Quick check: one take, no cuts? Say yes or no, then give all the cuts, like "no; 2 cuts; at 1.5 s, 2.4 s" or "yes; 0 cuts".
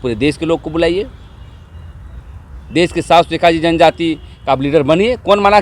yes; 0 cuts